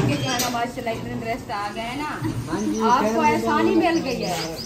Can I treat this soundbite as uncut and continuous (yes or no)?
yes